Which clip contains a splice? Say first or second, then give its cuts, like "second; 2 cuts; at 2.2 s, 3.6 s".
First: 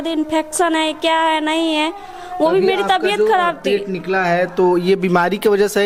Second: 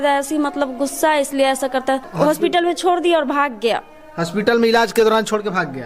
second; 1 cut; at 2.1 s